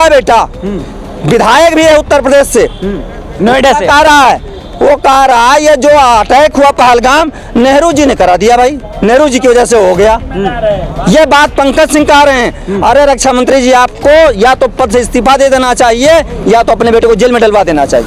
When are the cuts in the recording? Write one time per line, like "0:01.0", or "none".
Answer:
none